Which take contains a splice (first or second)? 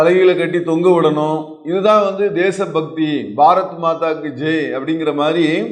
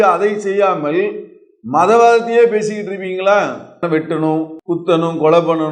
second